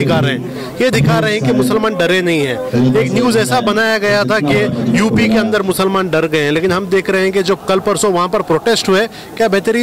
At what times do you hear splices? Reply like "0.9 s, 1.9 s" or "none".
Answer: none